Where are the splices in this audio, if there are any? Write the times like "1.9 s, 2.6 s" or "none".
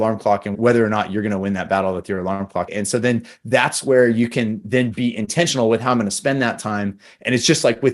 2.7 s